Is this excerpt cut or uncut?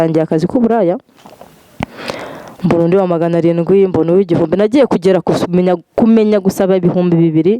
uncut